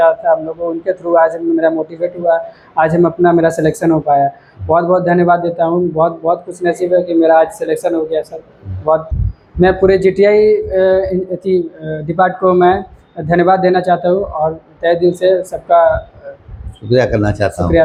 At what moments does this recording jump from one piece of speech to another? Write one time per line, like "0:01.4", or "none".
none